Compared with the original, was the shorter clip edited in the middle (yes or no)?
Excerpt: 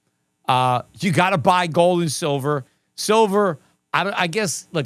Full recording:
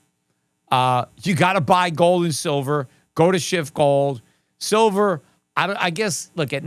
yes